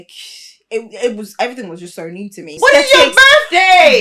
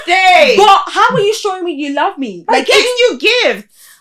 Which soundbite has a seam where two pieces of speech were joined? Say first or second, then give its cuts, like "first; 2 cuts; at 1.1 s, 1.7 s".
first; 1 cut; at 2.5 s